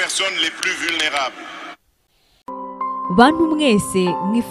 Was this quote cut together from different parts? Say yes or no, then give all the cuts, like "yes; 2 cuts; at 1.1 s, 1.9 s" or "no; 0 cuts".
no; 0 cuts